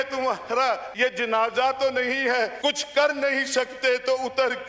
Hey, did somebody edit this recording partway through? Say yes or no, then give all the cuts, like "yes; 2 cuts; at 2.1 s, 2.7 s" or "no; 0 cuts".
yes; 2 cuts; at 0.9 s, 2.5 s